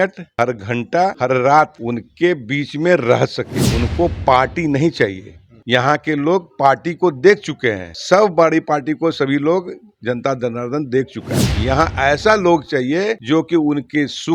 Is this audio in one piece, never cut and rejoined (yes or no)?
yes